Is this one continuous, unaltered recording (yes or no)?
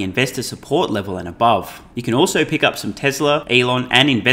no